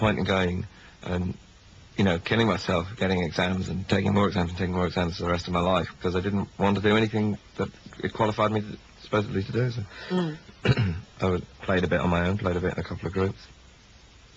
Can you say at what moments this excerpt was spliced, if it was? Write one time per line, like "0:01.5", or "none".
none